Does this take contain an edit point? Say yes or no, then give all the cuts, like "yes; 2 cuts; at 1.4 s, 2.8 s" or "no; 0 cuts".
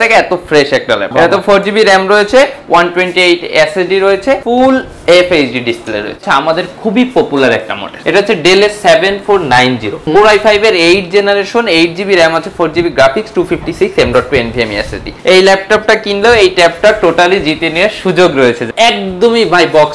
yes; 7 cuts; at 1.1 s, 4.4 s, 6.2 s, 7.9 s, 9.9 s, 15.1 s, 18.6 s